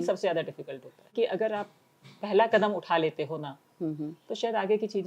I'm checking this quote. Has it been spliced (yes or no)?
yes